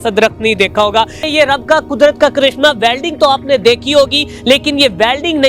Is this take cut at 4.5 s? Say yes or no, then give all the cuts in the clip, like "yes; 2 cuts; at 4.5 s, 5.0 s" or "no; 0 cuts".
no; 1 cut; at 1.2 s